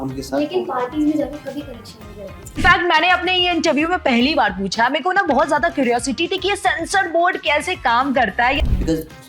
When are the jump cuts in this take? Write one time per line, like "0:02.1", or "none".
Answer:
0:02.6
0:08.6